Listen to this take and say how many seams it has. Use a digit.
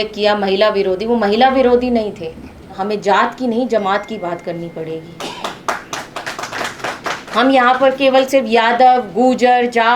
1